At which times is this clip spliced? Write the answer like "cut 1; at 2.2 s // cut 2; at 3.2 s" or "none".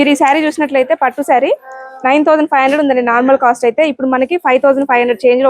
none